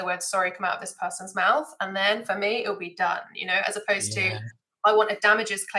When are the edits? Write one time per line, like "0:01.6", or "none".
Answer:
none